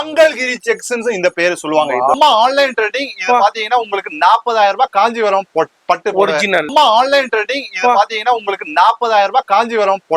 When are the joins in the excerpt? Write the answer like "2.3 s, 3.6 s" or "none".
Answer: 2.1 s, 6.7 s